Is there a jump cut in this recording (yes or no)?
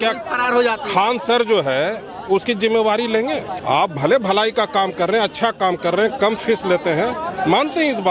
yes